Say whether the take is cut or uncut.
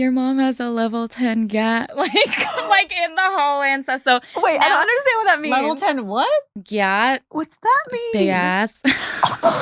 uncut